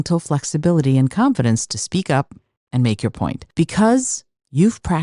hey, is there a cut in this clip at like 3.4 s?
yes; 1 cut; at 3.4 s

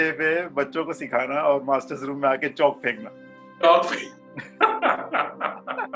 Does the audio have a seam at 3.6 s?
no; 0 cuts

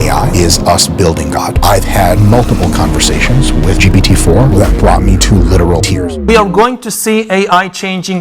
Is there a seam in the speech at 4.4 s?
no; 1 cut; at 6.2 s

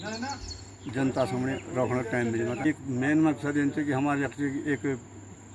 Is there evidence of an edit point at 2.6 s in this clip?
yes; 1 cut; at 2.6 s

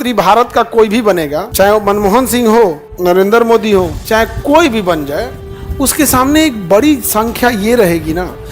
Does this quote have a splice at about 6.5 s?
no; 3 cuts; at 1.4 s, 2.9 s, 4.0 s

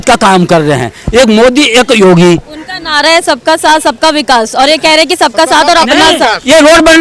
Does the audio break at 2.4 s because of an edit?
no; 0 cuts

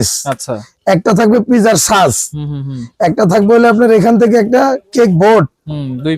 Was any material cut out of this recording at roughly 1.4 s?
no; 0 cuts

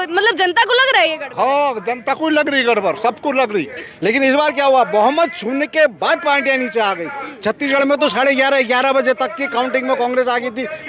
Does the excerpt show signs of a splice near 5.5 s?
no; 1 cut; at 3.7 s

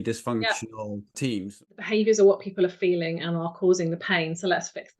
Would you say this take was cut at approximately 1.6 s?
yes; 1 cut; at 1.6 s

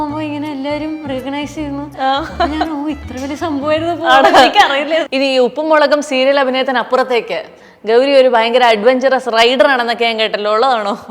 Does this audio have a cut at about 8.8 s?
no; 1 cut; at 5.1 s

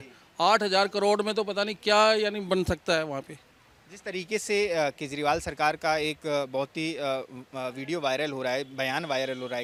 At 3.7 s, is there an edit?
no; 0 cuts

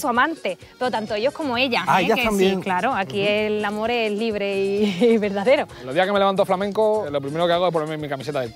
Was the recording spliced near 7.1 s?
yes; 2 cuts; at 5.8 s, 7.1 s

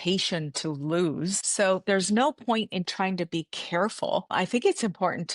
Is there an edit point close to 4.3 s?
yes; 2 cuts; at 1.4 s, 4.3 s

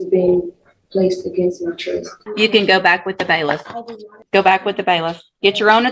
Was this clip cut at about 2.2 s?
yes; 2 cuts; at 2.2 s, 4.1 s

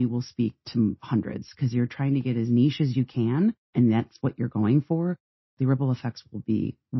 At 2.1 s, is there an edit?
no; 3 cuts; at 0.8 s, 3.6 s, 5.3 s

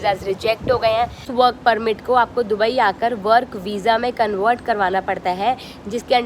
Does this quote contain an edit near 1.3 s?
yes; 1 cut; at 1.3 s

